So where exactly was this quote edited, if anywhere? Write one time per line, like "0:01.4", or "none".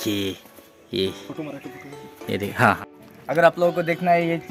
none